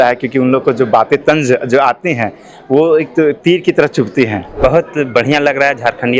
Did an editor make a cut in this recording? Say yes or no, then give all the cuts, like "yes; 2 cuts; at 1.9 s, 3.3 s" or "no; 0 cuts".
yes; 1 cut; at 4.5 s